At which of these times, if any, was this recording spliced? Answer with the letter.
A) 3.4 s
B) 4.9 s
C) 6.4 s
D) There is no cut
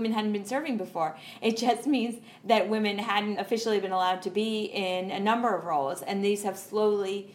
A